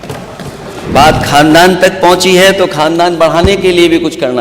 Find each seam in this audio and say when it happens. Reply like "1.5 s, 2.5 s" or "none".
0.9 s